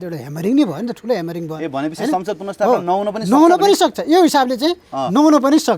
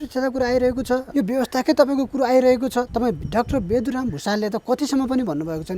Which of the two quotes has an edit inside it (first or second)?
second